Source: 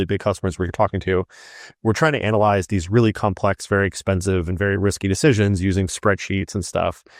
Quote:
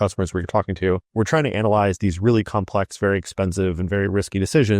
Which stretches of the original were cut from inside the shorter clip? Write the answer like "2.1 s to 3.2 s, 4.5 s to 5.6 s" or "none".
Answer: 1.3 s to 1.8 s

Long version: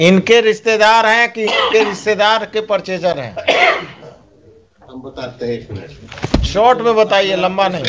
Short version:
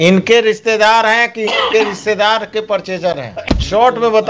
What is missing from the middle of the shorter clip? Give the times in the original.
3.3 s to 6.2 s

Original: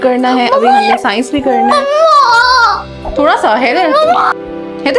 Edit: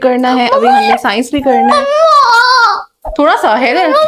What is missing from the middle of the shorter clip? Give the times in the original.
none

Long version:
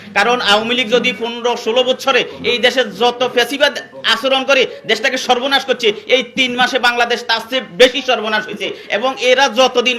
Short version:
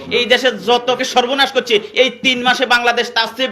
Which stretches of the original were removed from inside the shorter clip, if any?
3.3 s to 5.1 s

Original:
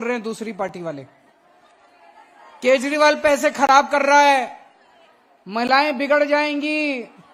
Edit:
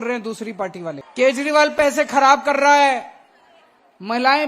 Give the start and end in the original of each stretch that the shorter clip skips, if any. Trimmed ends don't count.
1.0 s to 2.5 s

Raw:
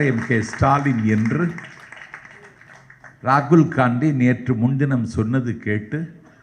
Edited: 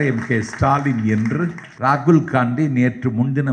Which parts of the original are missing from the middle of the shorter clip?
1.6 s to 3.1 s

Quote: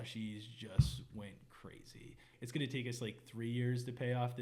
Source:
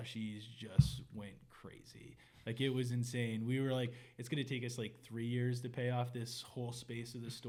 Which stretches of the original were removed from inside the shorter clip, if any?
2.3 s to 4.1 s

